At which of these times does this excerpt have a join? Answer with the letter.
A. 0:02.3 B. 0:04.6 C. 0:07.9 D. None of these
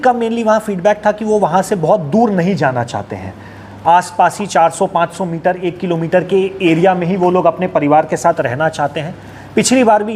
D